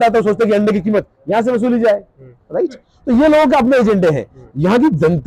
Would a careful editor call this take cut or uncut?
uncut